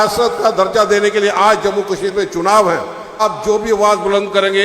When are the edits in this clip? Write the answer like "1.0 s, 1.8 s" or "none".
3.2 s